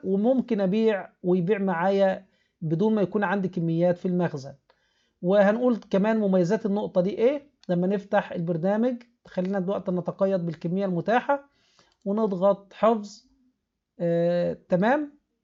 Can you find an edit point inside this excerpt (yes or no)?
no